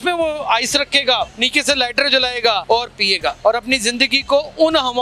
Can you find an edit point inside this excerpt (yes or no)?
yes